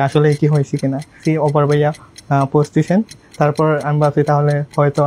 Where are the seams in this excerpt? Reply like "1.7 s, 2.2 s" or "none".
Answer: 1.2 s